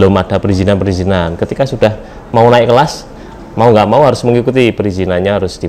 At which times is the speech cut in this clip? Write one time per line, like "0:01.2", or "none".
none

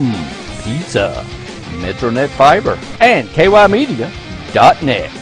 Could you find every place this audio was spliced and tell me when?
0:02.9

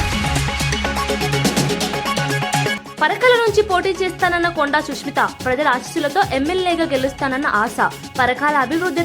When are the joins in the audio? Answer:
0:02.8

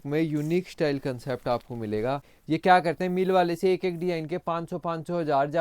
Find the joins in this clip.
0:02.3

